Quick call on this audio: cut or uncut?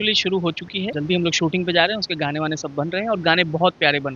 cut